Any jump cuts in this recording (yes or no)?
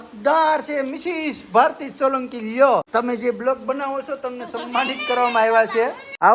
no